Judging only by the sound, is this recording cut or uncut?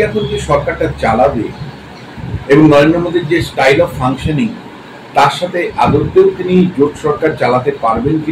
uncut